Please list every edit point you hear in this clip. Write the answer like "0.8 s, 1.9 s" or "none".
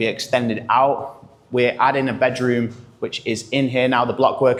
none